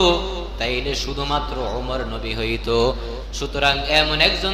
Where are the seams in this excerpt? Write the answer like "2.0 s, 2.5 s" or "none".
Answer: none